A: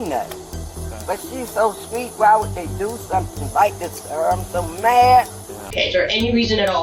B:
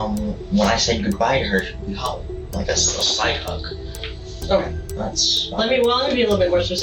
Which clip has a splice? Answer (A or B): A